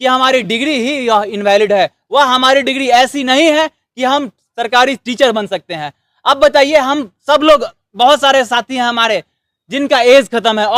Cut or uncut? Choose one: uncut